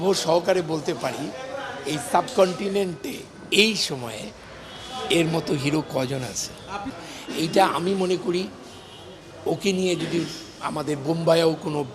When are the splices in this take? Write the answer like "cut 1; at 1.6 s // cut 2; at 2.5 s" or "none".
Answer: cut 1; at 6.9 s